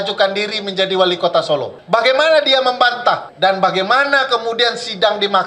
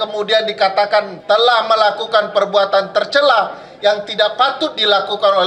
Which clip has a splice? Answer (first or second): first